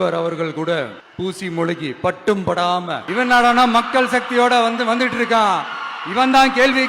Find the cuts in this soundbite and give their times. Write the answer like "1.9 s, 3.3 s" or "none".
1.0 s, 3.0 s

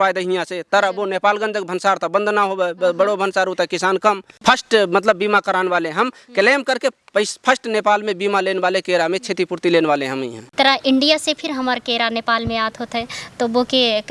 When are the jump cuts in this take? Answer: 4.3 s, 10.4 s

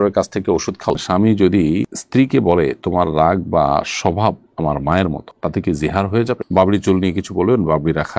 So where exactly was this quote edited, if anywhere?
0.9 s, 6.4 s

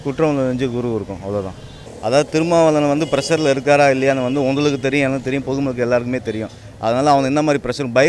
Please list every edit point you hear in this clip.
1.9 s

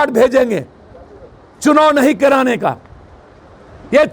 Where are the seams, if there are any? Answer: none

